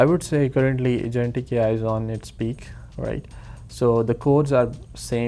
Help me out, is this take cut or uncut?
uncut